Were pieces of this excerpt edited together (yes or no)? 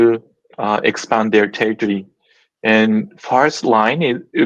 no